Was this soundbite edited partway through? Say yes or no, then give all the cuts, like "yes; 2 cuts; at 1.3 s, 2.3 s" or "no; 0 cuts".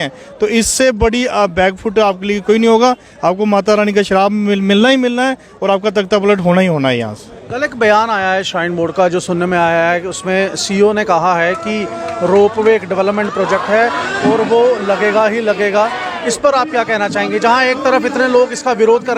no; 0 cuts